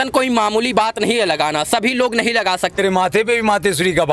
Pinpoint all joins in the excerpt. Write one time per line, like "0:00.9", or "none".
0:02.8